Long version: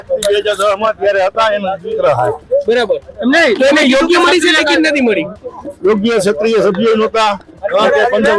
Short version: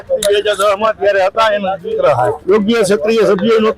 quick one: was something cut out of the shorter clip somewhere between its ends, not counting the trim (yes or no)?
yes